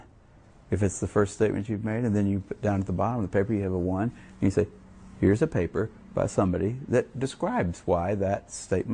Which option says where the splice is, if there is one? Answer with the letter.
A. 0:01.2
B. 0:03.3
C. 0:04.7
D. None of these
B